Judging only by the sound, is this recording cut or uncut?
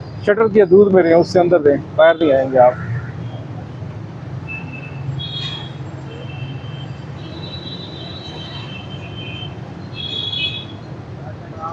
uncut